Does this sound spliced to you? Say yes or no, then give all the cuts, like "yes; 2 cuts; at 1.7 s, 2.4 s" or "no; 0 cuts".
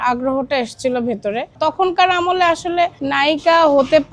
yes; 2 cuts; at 1.6 s, 3.0 s